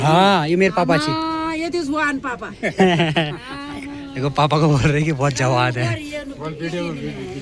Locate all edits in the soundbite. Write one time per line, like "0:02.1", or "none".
none